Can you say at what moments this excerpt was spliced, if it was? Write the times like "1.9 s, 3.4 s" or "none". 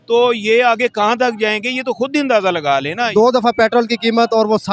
3.1 s